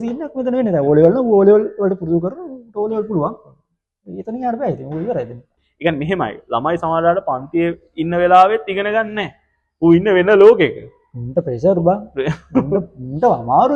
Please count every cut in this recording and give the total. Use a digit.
1